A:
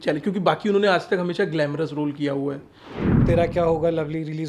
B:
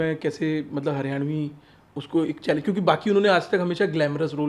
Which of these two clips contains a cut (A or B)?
A